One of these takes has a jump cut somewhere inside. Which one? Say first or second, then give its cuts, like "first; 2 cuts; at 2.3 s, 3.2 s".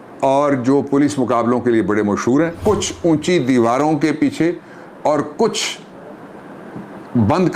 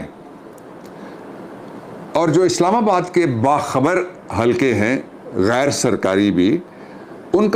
first; 1 cut; at 2.6 s